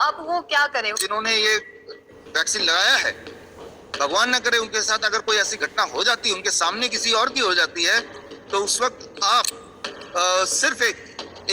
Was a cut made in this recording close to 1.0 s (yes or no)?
yes